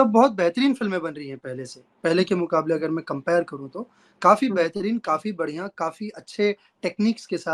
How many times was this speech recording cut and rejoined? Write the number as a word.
zero